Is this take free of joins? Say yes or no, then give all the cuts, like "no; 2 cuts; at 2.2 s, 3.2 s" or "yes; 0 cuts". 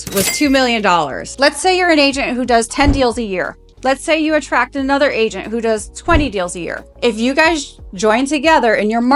no; 1 cut; at 1.2 s